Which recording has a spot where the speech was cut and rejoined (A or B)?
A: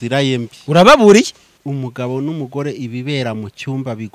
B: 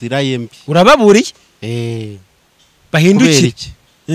A